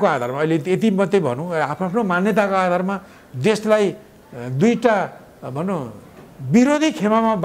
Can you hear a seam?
no; 0 cuts

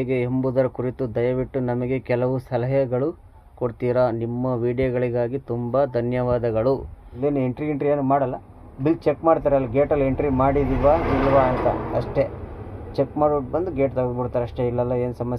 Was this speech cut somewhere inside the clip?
yes; 1 cut; at 7.1 s

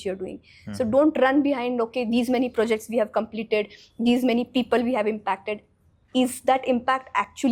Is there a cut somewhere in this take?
no; 0 cuts

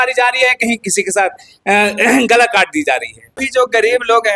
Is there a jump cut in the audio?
yes; 1 cut; at 3.4 s

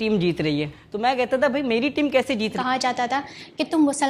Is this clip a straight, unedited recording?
no; 1 cut; at 2.6 s

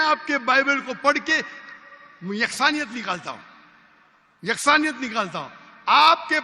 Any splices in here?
no; 0 cuts

